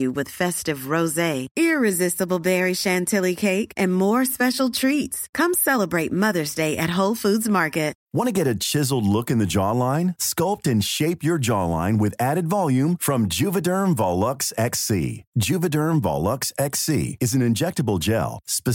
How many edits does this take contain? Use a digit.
1